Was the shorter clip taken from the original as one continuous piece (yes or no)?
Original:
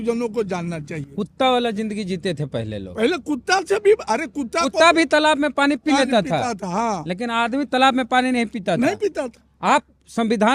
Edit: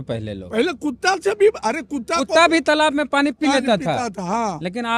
yes